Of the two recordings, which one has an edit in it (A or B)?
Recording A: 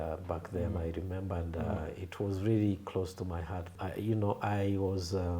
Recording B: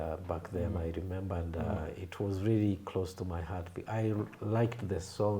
A